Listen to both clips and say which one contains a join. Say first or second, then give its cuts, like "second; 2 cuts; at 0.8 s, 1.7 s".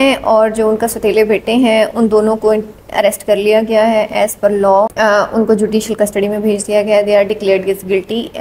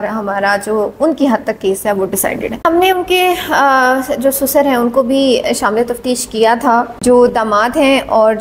second; 2 cuts; at 2.5 s, 6.9 s